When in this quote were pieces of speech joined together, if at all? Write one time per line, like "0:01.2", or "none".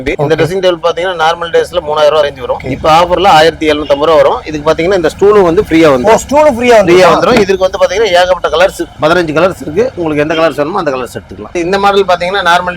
none